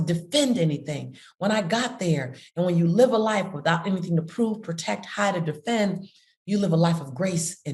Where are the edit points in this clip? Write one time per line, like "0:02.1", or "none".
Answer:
none